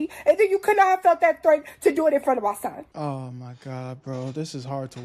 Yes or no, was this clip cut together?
yes